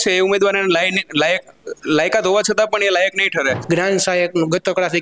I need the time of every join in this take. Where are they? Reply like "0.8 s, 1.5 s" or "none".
3.6 s